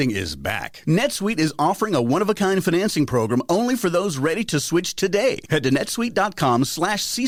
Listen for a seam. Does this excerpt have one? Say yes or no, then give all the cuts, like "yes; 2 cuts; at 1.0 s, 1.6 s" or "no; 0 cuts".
no; 0 cuts